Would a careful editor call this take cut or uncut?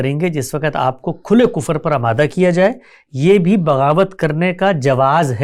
uncut